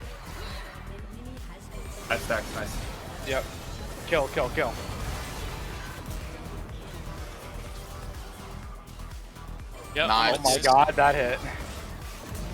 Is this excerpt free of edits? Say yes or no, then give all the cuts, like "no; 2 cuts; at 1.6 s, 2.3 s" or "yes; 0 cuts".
no; 1 cut; at 1.1 s